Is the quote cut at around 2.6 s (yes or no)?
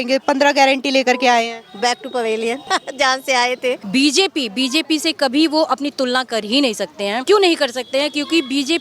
yes